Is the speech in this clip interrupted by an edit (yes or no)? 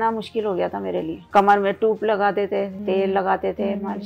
yes